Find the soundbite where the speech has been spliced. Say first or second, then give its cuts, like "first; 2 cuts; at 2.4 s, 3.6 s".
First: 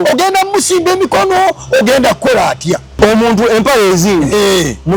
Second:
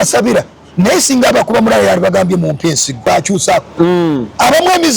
second; 1 cut; at 3.1 s